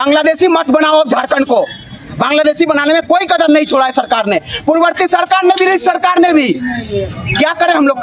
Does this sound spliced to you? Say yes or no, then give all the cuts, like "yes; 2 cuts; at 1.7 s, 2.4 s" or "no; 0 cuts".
no; 0 cuts